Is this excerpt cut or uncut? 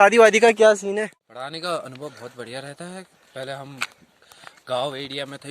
cut